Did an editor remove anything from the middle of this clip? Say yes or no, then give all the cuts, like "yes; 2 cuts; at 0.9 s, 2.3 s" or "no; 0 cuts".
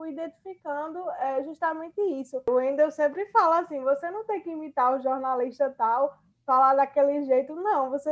yes; 1 cut; at 2.5 s